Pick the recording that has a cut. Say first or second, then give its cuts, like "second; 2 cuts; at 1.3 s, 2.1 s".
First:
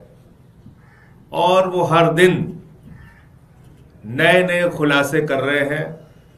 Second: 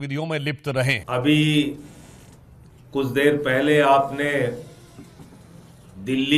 second; 1 cut; at 1.0 s